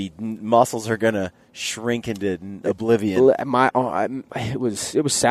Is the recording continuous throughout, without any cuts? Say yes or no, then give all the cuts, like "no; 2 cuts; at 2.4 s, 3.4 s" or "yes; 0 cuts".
yes; 0 cuts